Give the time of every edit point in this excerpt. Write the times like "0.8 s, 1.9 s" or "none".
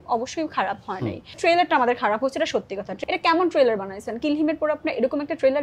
1.4 s, 2.8 s